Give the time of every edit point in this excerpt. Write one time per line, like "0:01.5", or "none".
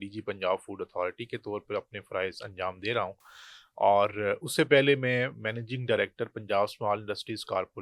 none